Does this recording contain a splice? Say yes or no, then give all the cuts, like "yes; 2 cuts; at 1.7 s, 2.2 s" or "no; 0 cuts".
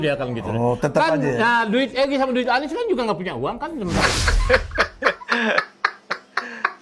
yes; 1 cut; at 4.0 s